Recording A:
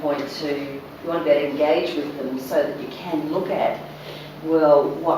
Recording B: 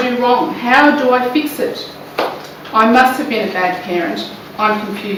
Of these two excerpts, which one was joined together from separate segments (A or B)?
A